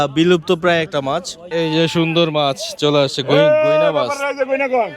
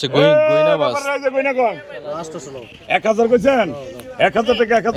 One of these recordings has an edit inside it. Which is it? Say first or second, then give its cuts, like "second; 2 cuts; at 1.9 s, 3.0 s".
first; 1 cut; at 1.4 s